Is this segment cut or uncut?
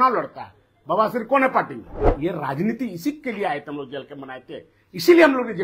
cut